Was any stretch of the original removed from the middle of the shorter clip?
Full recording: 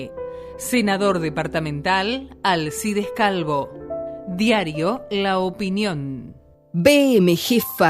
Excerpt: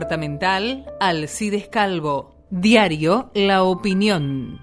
yes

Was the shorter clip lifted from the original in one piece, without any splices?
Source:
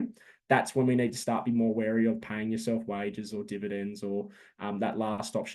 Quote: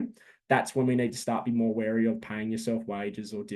yes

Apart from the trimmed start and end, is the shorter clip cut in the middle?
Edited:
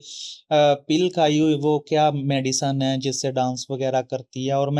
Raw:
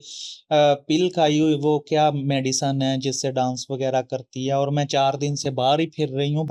no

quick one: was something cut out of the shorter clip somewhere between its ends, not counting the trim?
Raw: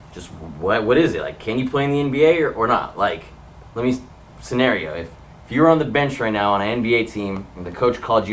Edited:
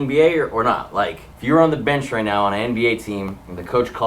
yes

